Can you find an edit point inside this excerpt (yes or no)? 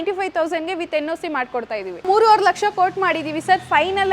yes